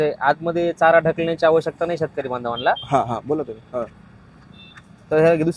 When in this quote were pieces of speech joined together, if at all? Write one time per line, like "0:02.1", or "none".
none